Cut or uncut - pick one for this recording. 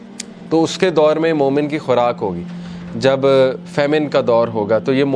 uncut